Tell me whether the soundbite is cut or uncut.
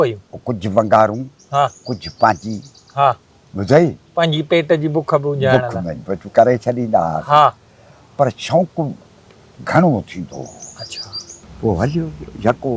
cut